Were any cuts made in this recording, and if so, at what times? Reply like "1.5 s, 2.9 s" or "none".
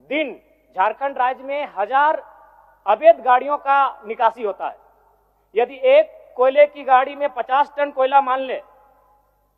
none